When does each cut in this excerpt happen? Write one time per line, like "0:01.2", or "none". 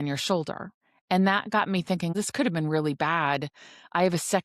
0:02.1